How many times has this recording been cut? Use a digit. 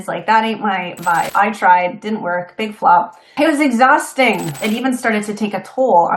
3